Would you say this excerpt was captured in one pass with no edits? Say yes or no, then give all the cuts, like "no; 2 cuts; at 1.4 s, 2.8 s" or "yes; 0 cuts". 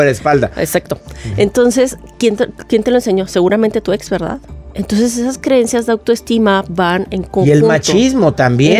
yes; 0 cuts